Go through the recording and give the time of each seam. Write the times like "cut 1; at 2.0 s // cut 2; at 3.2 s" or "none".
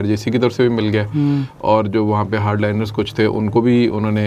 none

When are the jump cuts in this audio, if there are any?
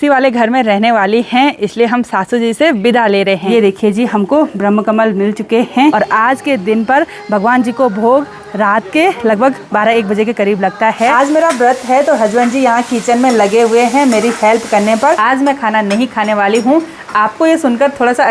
cut 1; at 3.5 s // cut 2; at 5.9 s // cut 3; at 11.1 s // cut 4; at 15.2 s

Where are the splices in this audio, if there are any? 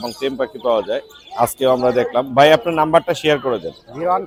none

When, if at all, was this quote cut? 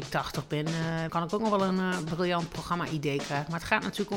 cut 1; at 1.1 s

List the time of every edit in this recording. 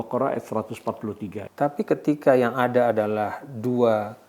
cut 1; at 1.4 s

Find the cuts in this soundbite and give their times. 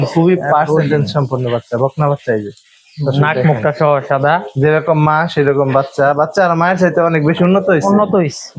none

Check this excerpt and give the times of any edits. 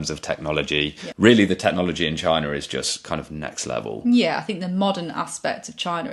cut 1; at 1.0 s

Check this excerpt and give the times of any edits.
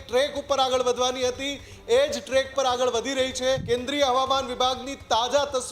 cut 1; at 3.6 s

